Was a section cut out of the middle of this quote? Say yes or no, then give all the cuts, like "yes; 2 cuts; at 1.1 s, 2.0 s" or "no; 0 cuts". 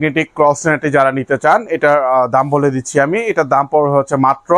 no; 0 cuts